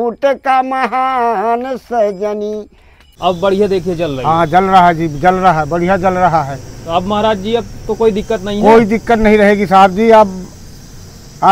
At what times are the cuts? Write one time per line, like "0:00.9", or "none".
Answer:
0:03.2